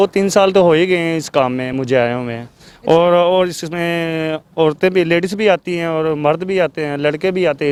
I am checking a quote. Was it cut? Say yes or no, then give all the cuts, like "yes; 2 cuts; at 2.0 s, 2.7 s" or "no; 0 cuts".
no; 0 cuts